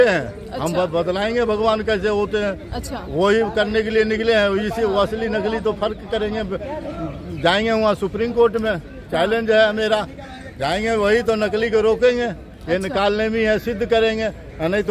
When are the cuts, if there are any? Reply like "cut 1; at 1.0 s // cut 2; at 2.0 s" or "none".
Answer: none